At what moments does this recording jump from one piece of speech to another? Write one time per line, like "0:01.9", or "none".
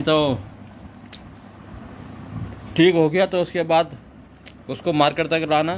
none